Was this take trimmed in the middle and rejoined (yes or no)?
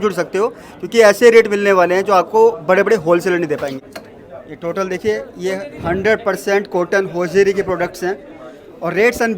yes